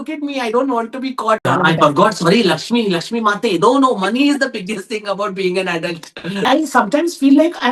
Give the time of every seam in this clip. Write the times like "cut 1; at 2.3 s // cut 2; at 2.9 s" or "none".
cut 1; at 1.5 s // cut 2; at 6.5 s